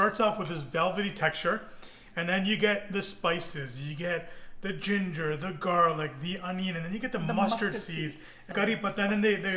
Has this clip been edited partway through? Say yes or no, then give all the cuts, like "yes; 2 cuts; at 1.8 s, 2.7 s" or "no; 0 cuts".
yes; 1 cut; at 8.4 s